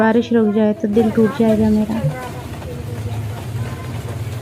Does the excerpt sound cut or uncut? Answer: uncut